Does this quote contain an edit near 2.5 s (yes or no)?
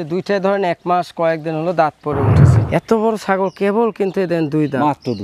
yes